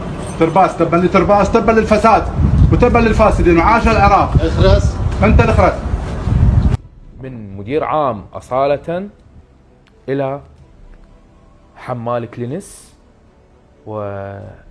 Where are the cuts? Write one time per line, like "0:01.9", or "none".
0:06.8